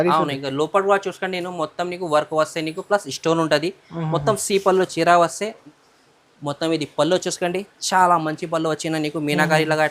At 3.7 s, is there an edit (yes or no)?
no